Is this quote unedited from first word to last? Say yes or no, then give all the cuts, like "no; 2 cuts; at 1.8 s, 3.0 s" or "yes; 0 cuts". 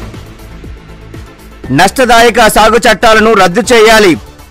no; 1 cut; at 1.7 s